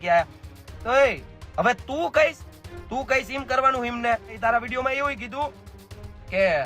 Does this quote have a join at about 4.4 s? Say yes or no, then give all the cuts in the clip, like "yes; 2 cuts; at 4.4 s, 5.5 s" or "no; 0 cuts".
yes; 1 cut; at 4.4 s